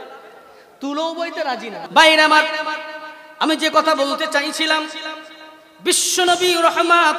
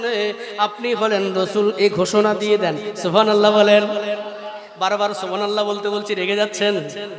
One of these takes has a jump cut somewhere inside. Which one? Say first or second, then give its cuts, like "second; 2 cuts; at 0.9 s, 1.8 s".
first; 1 cut; at 1.8 s